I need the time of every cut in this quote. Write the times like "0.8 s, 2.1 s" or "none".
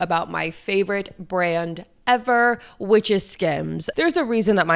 3.8 s